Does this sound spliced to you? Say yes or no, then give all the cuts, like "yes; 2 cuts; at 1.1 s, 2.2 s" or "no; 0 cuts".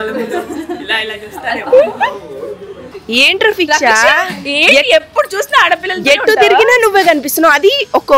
no; 0 cuts